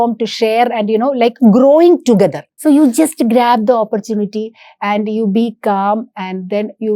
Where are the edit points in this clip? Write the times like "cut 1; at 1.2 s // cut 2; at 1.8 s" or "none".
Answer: cut 1; at 2.5 s

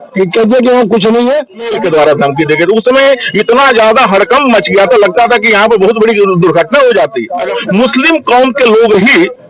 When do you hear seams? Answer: cut 1; at 1.7 s // cut 2; at 7.5 s

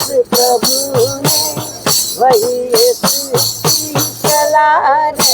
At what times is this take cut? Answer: none

